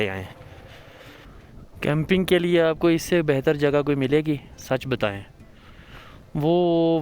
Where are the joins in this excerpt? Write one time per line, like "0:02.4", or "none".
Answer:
0:01.3

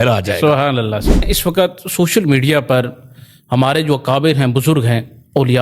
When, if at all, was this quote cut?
0:01.3

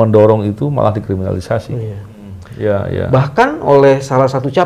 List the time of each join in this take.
0:02.4

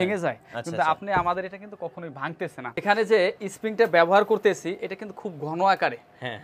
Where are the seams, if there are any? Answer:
0:02.8

